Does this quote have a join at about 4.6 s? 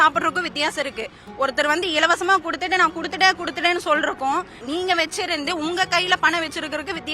yes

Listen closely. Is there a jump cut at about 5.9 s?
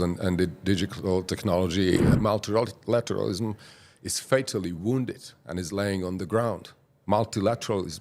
no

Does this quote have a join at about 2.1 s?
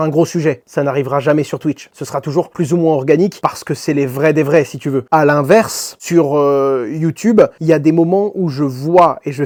no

